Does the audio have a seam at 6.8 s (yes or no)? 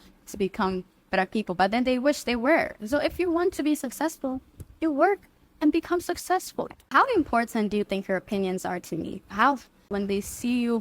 yes